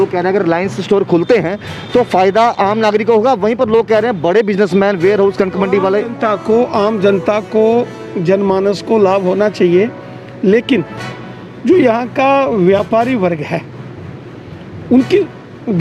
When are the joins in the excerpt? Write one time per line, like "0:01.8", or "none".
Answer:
none